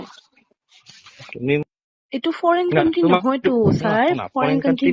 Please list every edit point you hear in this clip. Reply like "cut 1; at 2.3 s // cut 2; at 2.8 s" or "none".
cut 1; at 1.6 s